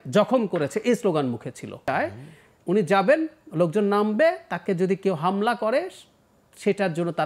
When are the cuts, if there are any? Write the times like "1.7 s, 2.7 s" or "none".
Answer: 1.8 s